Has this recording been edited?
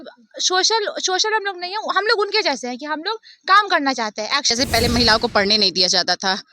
yes; 1 cut; at 4.4 s

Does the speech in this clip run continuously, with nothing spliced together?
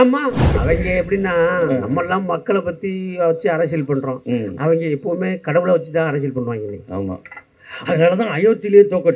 yes; 0 cuts

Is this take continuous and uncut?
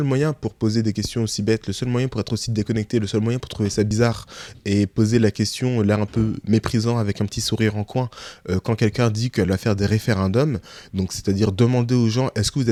yes; 0 cuts

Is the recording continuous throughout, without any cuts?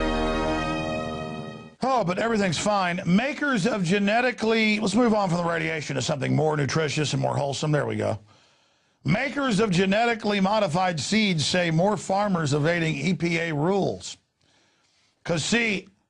no; 1 cut; at 3.7 s

